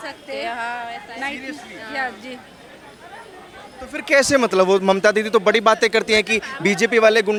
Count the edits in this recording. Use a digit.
0